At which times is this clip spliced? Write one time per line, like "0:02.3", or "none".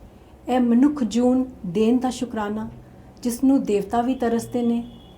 none